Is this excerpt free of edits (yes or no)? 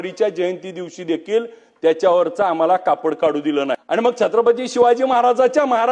no